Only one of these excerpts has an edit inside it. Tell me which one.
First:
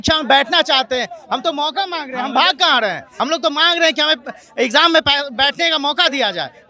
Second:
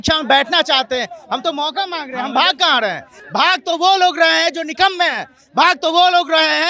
first; 1 cut; at 3.3 s

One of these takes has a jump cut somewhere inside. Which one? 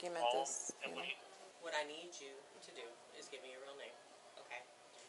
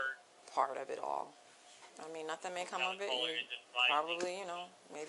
first; 1 cut; at 1.5 s

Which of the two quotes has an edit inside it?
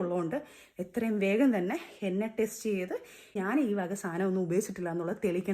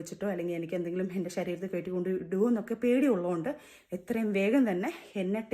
first; 1 cut; at 3.4 s

